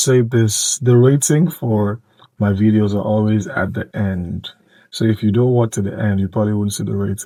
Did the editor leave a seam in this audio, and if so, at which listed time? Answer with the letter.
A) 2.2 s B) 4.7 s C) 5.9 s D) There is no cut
D